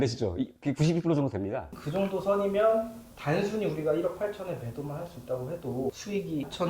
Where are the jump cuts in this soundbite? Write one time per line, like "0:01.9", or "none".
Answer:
0:01.8